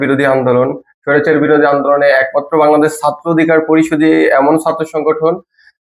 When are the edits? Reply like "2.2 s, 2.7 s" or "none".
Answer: none